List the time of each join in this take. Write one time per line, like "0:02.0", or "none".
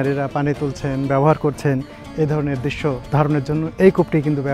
0:03.0